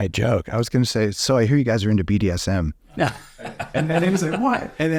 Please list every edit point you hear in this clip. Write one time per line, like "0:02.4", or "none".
none

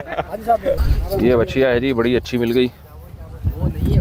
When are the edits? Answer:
none

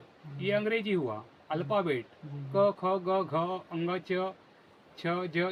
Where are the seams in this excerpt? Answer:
none

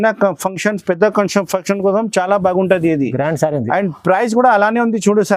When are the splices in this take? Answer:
none

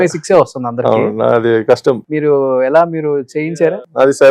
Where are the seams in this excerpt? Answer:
0:02.1
0:03.5

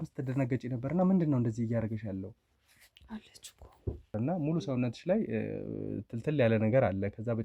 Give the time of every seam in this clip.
0:04.1

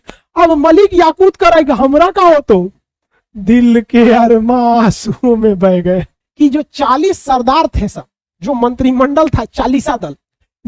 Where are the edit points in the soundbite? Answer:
0:06.2

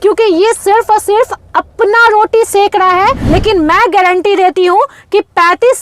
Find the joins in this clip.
0:03.2

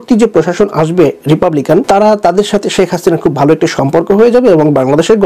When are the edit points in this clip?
none

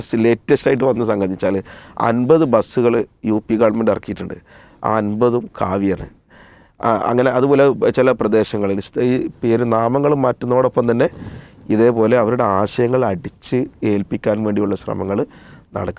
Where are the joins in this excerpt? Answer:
none

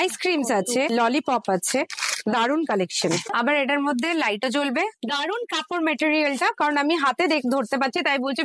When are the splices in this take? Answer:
0:03.3
0:04.9

